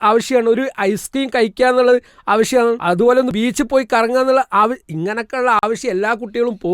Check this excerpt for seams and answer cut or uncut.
cut